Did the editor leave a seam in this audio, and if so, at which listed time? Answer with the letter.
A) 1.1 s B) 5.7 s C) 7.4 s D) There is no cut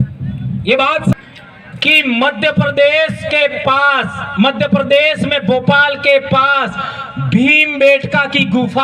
A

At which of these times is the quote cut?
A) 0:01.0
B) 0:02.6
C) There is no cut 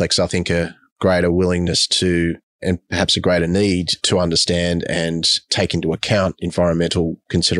A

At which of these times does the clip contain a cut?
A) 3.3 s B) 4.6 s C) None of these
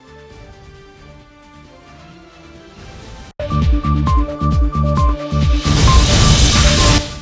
A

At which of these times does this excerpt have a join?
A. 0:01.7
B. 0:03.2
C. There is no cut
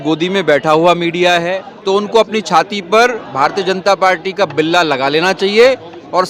A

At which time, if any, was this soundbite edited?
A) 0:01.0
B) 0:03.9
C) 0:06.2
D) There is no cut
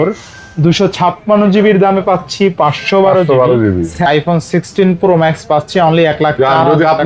B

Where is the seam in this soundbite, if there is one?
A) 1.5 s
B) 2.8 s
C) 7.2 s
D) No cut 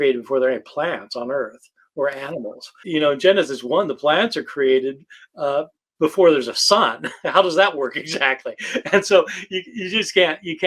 B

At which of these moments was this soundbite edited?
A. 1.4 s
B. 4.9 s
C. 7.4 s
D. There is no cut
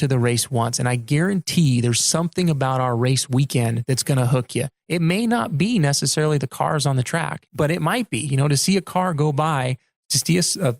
C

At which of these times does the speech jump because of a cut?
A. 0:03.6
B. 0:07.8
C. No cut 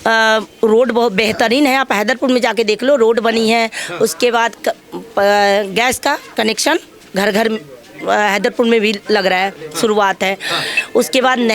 C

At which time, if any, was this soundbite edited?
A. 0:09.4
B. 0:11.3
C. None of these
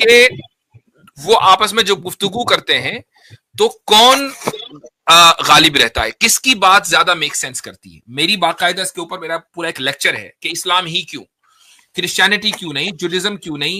C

